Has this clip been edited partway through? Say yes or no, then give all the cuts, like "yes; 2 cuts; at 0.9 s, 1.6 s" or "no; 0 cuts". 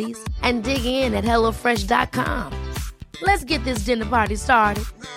no; 0 cuts